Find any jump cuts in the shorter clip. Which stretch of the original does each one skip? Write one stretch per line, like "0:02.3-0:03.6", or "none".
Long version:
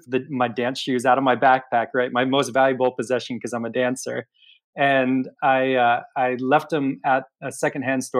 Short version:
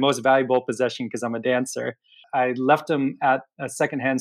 0:04.5-0:06.1